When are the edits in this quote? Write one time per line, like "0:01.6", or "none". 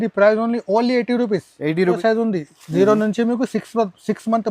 0:02.0